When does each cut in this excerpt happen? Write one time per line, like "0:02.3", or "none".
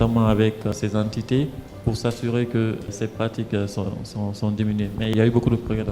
0:00.7
0:02.9
0:05.1

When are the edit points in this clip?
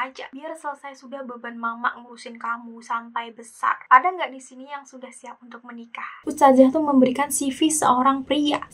0:03.8
0:06.2

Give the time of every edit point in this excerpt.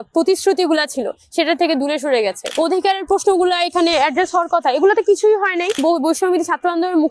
0:02.4
0:05.8

